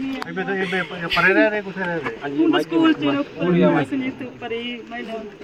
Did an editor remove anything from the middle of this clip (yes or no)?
no